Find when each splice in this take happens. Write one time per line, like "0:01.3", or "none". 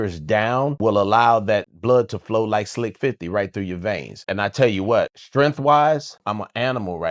0:00.8
0:01.7
0:04.2
0:05.2
0:06.2